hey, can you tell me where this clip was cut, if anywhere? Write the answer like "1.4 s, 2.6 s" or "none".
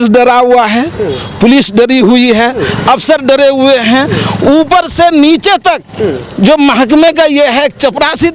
none